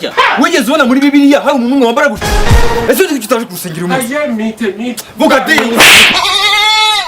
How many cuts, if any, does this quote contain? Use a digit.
1